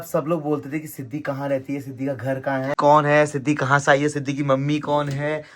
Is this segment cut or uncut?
uncut